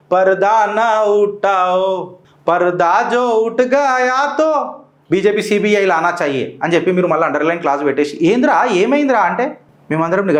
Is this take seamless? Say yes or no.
yes